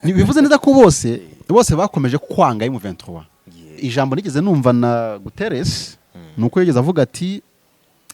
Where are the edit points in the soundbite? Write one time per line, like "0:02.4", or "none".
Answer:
0:03.8